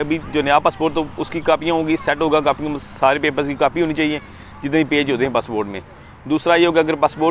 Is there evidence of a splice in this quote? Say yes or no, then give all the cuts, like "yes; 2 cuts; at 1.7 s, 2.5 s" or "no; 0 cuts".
no; 0 cuts